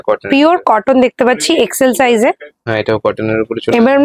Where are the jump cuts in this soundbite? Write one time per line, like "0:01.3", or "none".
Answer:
0:02.5